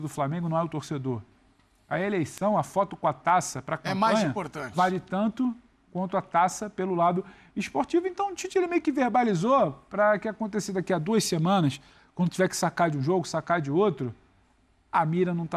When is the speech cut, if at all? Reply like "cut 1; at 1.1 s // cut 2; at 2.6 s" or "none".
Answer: none